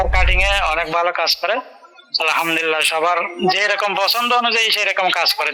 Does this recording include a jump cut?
no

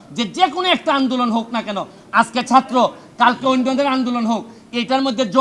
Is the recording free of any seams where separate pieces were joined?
yes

